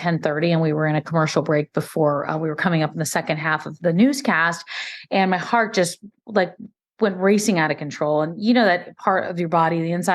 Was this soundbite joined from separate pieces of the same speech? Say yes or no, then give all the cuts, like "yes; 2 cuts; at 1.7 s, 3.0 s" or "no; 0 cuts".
yes; 1 cut; at 3.7 s